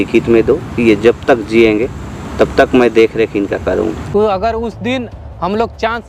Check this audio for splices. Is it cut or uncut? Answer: cut